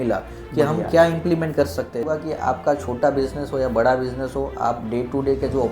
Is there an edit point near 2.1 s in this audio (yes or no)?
yes